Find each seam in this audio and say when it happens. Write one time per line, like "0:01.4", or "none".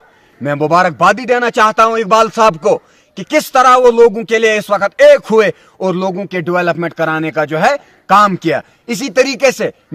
none